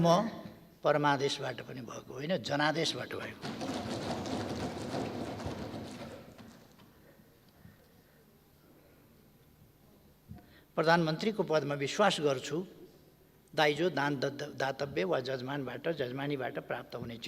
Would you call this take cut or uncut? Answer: uncut